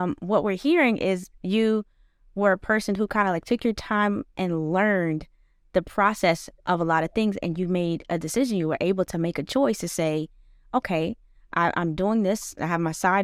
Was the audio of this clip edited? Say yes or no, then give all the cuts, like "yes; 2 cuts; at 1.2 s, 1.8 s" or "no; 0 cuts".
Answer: no; 0 cuts